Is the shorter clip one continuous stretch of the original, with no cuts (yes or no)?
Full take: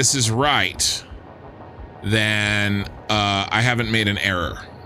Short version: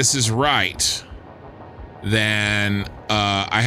yes